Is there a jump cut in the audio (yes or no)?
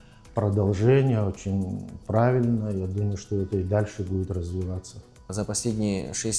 yes